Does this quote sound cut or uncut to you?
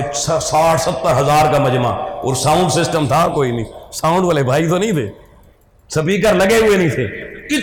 uncut